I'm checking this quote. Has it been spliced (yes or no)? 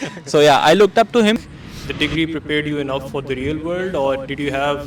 yes